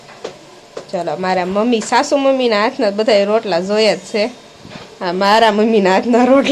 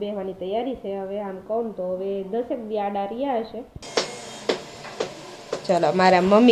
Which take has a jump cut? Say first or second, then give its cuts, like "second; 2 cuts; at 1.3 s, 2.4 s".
second; 1 cut; at 3.8 s